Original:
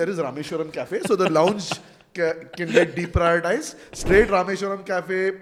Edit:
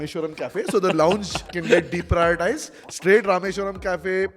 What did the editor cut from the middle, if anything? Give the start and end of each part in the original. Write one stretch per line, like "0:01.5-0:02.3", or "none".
0:01.8-0:02.5